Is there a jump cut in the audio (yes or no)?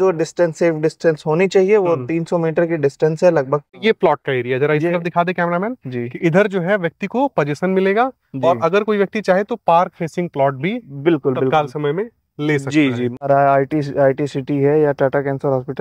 yes